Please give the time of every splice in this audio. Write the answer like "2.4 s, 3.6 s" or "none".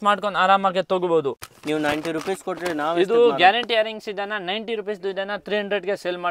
1.5 s

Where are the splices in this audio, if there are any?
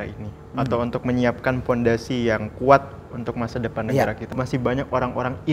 4.4 s

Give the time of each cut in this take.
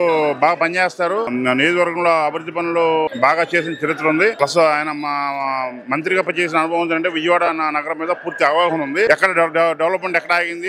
1.3 s, 3.1 s, 4.4 s, 9.1 s

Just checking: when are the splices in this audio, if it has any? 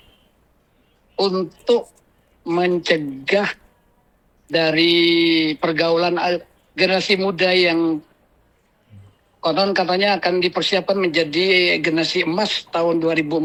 none

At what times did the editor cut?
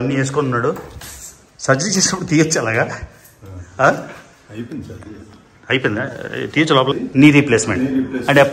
6.9 s

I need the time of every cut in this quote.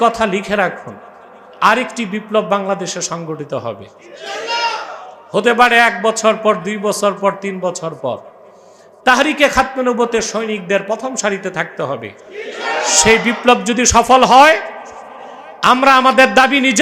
none

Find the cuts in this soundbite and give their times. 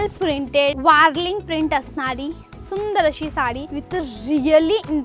0.8 s, 3.7 s

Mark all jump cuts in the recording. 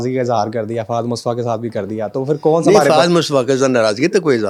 none

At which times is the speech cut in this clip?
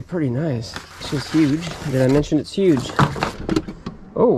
3.4 s

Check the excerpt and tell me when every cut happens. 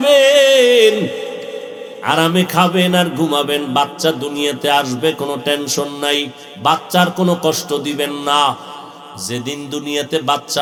none

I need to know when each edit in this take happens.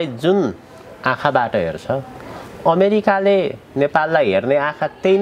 none

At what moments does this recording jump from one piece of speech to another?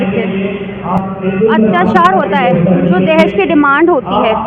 1.0 s

